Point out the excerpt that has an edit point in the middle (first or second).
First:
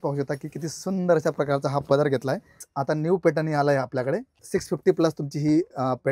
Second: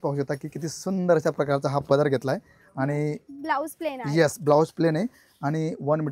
first